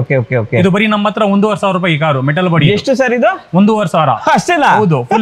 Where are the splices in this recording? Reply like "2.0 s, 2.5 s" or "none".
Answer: none